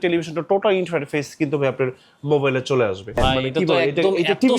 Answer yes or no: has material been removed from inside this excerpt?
yes